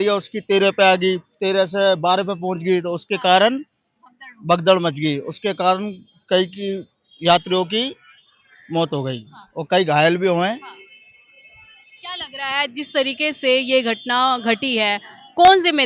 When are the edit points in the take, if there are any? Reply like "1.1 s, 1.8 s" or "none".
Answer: none